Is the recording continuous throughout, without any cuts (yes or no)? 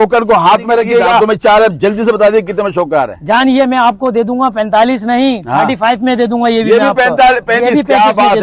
no